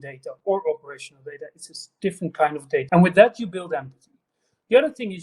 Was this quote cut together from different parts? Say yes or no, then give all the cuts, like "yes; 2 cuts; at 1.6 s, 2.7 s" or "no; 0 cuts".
yes; 1 cut; at 2.9 s